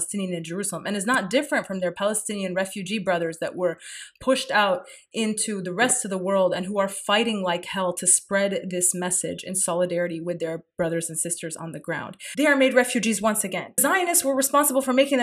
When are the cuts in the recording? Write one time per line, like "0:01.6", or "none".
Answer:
0:12.2
0:13.8